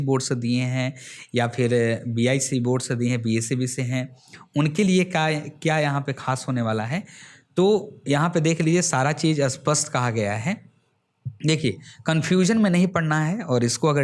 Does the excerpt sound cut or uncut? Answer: uncut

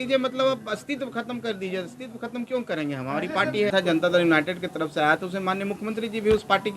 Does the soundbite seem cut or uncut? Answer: cut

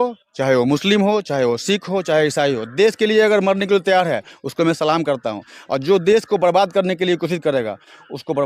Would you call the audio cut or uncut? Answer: uncut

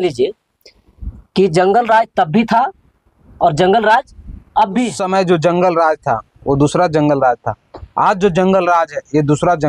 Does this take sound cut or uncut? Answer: cut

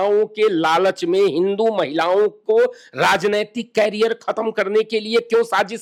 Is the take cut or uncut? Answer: uncut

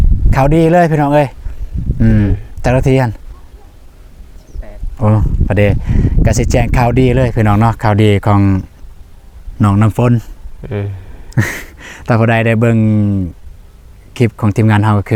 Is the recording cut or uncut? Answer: uncut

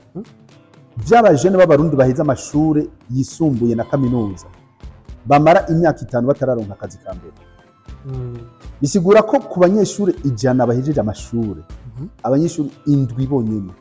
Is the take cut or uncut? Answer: uncut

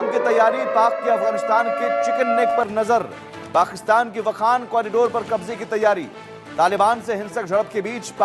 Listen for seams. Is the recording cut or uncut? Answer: uncut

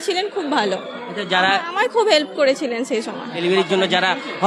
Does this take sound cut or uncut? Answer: uncut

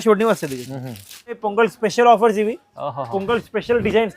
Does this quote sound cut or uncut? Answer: cut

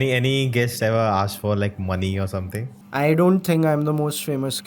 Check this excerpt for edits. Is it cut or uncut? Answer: cut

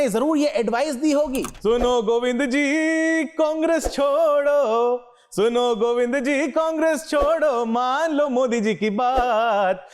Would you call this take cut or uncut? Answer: cut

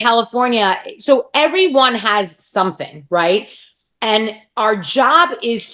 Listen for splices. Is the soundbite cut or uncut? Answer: uncut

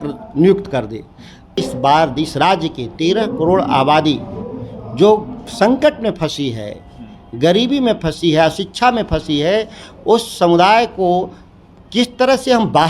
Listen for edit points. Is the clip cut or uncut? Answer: cut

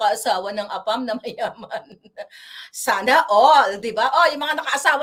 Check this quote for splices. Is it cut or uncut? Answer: uncut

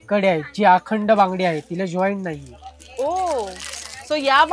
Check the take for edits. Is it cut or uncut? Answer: uncut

